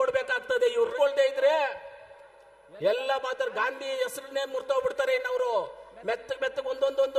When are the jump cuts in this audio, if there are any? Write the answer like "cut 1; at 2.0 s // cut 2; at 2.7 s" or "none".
cut 1; at 0.9 s